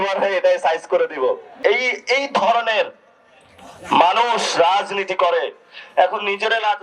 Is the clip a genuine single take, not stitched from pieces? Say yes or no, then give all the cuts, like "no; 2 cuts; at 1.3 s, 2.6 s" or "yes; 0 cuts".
no; 1 cut; at 1.5 s